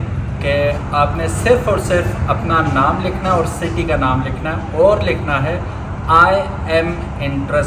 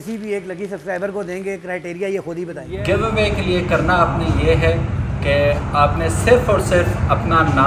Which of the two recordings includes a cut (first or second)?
second